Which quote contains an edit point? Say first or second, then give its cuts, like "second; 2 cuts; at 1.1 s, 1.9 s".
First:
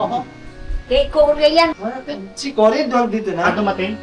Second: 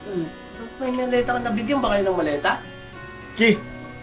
first; 1 cut; at 1.7 s